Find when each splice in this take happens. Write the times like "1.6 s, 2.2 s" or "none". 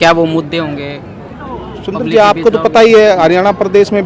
none